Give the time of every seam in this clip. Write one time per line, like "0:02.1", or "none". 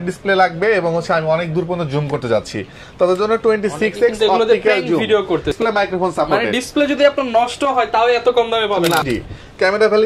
0:05.6
0:09.0